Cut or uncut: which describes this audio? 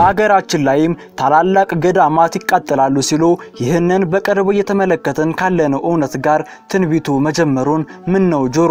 uncut